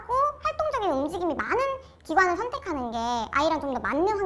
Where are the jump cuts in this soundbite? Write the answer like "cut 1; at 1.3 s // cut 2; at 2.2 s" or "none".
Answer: none